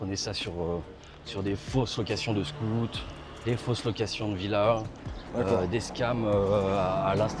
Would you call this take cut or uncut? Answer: uncut